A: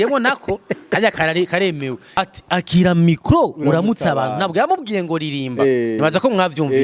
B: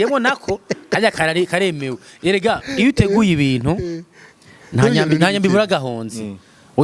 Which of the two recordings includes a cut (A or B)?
A